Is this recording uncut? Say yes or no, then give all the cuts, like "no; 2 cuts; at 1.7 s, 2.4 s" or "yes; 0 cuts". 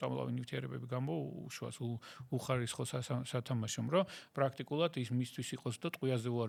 yes; 0 cuts